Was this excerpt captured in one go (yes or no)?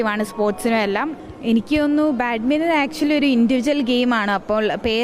no